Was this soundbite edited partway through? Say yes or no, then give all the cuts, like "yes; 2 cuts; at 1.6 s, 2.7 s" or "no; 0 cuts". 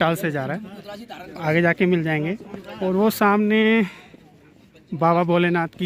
no; 0 cuts